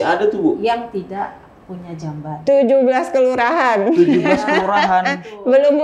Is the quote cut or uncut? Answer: uncut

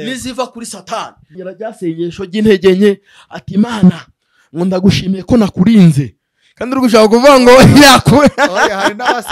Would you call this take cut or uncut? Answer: cut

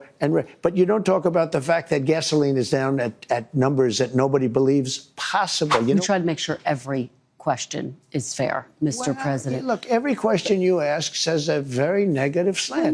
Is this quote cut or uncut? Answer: cut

